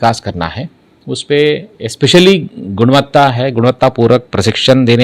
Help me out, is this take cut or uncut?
uncut